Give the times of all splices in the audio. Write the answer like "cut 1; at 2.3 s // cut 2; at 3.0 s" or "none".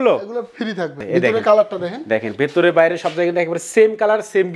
cut 1; at 1.0 s